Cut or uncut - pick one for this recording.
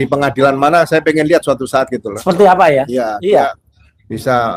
uncut